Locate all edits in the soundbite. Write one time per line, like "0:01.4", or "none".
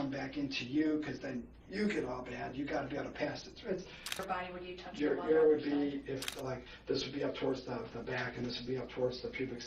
0:04.2
0:06.3